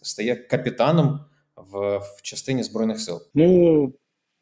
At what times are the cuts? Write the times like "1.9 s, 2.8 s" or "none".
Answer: 3.2 s